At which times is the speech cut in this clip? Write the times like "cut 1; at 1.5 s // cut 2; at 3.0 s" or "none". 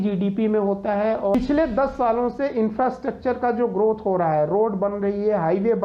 cut 1; at 1.3 s